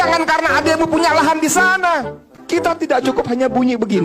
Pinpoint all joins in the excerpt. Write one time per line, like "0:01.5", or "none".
0:02.3

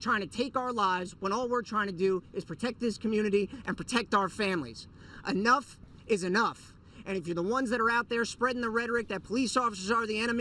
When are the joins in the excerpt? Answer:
0:04.6
0:06.6

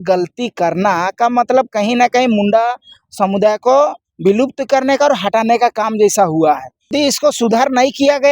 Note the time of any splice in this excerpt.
0:06.9

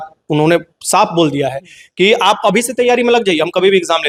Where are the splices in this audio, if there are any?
none

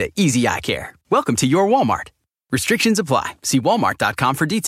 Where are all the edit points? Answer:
none

